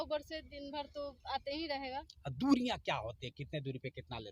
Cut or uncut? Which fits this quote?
uncut